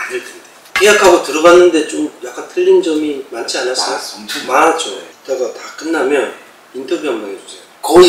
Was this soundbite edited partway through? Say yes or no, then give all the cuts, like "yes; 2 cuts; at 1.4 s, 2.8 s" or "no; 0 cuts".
no; 0 cuts